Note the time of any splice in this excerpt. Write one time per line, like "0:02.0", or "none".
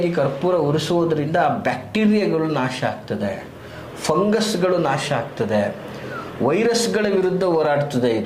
none